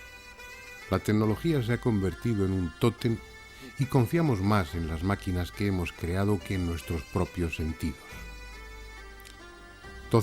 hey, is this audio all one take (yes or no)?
no